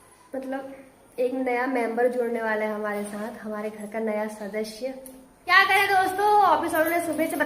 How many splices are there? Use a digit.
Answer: 1